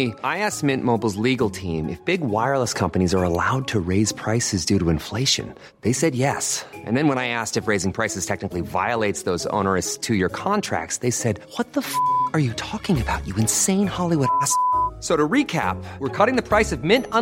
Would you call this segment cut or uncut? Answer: uncut